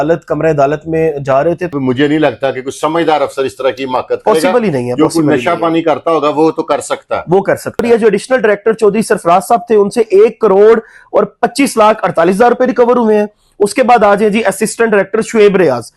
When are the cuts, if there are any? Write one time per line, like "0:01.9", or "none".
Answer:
0:01.7
0:07.8